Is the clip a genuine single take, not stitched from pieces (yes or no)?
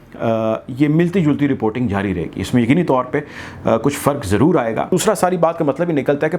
no